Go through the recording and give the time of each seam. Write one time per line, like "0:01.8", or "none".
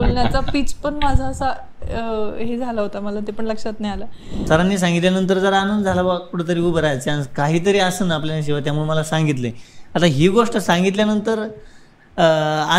0:04.4